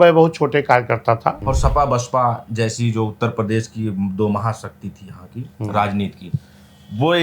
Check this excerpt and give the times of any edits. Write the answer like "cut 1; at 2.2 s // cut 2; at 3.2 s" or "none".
cut 1; at 1.4 s